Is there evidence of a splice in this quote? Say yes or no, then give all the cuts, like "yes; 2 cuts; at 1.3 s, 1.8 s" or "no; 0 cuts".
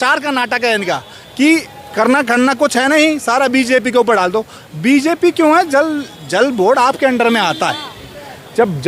no; 0 cuts